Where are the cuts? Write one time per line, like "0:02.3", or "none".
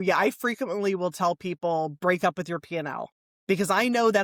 none